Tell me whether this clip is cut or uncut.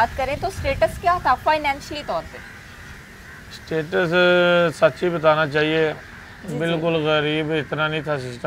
uncut